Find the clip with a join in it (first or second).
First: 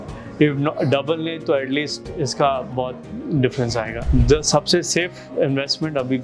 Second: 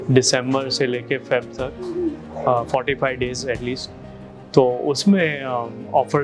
first